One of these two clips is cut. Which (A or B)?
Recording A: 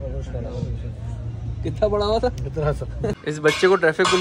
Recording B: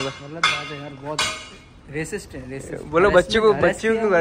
A